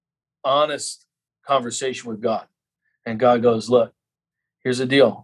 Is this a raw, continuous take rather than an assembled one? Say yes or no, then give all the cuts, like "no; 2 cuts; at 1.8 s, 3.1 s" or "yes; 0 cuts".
yes; 0 cuts